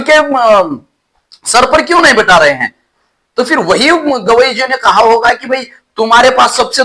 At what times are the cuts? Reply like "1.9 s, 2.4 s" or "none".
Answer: none